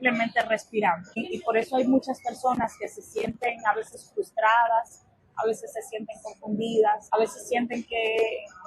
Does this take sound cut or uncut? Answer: cut